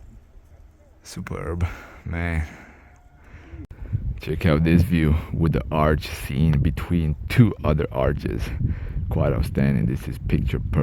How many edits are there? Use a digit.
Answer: 1